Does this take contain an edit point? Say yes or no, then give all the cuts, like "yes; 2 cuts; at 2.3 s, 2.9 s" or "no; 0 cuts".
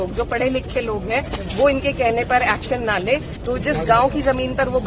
yes; 1 cut; at 3.3 s